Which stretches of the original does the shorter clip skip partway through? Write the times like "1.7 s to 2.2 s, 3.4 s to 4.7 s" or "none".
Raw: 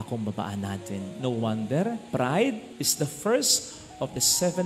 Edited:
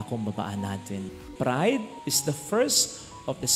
1.2 s to 1.9 s